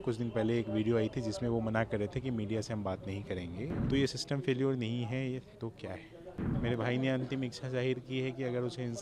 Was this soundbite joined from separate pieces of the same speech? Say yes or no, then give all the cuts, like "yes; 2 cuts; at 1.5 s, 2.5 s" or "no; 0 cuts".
yes; 2 cuts; at 3.8 s, 6.5 s